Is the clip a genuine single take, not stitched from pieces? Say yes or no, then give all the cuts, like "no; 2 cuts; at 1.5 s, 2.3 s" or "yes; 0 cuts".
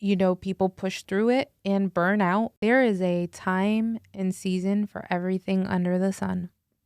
no; 1 cut; at 2.5 s